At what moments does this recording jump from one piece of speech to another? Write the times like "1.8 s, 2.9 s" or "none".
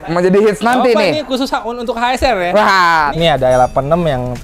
3.1 s

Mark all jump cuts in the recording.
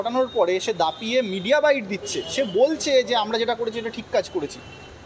none

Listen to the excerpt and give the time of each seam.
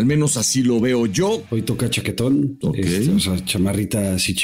1.4 s, 3.0 s

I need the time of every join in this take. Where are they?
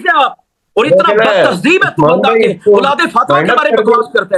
none

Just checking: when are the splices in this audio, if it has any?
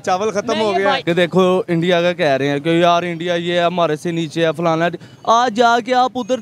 1.0 s

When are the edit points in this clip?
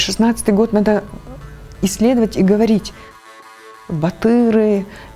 3.3 s

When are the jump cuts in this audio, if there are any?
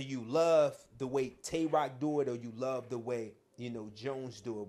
none

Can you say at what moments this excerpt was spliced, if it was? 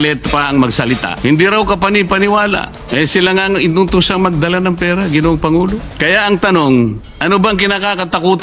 1.1 s, 2.8 s, 5.9 s, 7.1 s

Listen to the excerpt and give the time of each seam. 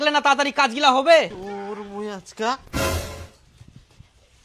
1.4 s

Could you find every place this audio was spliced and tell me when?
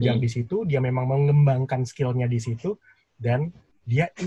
none

